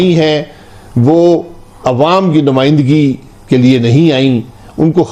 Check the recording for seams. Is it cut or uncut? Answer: uncut